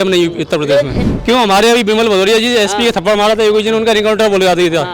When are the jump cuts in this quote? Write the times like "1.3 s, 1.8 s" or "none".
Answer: 1.0 s